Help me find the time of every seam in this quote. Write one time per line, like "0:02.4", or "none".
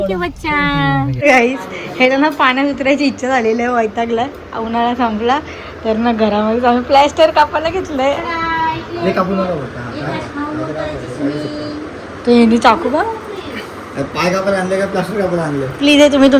0:01.2

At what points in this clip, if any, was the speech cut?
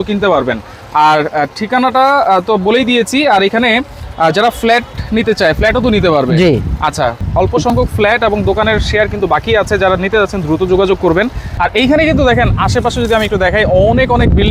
none

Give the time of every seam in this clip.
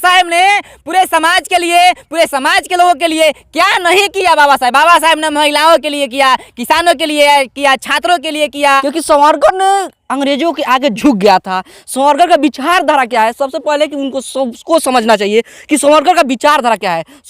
0:08.8

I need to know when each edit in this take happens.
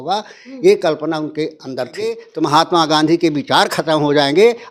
0:02.3

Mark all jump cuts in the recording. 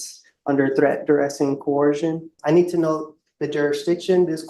0:02.3

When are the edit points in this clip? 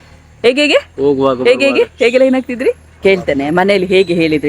0:03.0

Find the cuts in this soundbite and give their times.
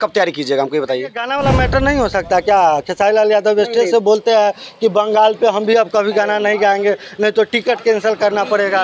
0:01.0

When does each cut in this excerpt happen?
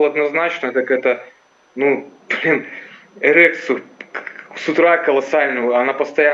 none

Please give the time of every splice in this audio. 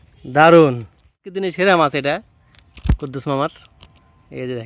0:01.3

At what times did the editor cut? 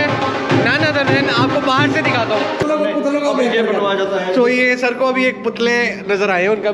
0:02.6

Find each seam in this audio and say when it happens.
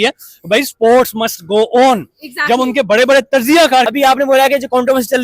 0:03.9

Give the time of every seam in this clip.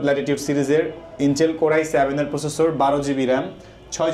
none

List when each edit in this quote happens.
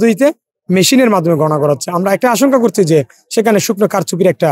none

